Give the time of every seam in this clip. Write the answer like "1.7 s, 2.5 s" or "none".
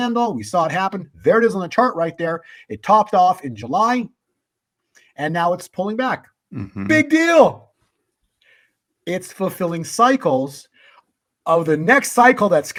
none